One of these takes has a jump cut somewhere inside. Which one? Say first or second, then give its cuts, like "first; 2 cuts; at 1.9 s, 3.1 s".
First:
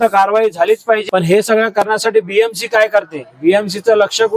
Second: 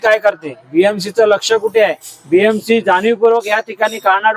first; 1 cut; at 1.0 s